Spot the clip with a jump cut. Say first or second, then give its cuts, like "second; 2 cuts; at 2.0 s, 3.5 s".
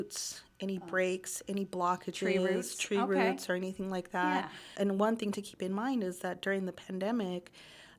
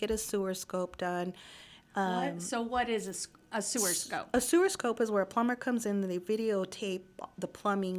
first; 1 cut; at 4.6 s